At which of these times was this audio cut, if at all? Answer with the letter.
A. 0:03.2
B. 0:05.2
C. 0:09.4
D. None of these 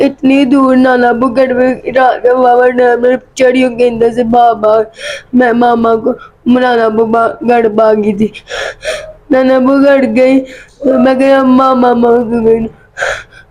D